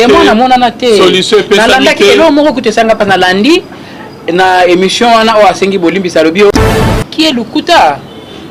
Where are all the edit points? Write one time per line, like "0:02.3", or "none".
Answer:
0:06.7